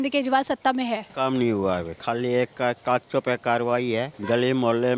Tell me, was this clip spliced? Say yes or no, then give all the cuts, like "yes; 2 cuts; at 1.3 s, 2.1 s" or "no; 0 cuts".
yes; 3 cuts; at 1.1 s, 1.9 s, 4.1 s